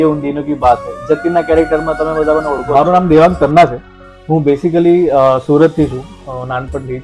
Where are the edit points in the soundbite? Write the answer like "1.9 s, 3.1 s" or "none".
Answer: 2.7 s